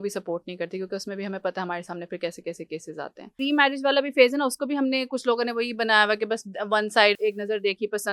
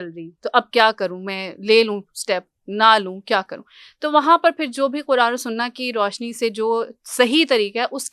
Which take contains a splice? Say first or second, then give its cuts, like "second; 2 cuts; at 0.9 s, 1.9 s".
first; 2 cuts; at 3.3 s, 7.1 s